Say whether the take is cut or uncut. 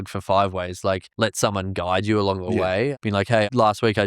cut